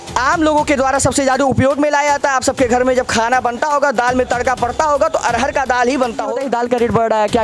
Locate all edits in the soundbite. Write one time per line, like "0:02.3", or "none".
0:06.3